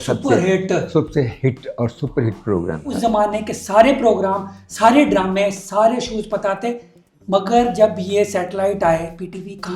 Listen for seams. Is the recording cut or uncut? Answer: cut